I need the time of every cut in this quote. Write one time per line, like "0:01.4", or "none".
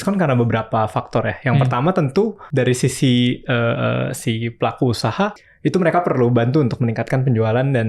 0:02.4
0:05.4

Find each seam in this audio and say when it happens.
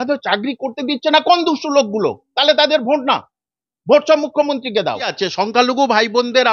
0:05.1

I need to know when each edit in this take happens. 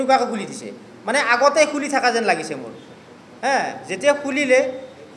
none

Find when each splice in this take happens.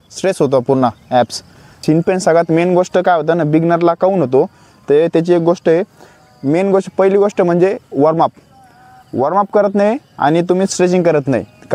0:01.8

